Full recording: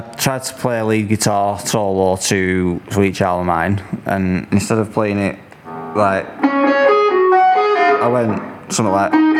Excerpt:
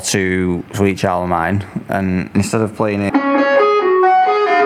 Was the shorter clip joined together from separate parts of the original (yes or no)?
yes